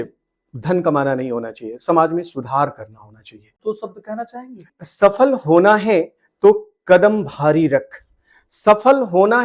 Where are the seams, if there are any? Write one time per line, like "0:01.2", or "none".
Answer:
0:03.6
0:04.8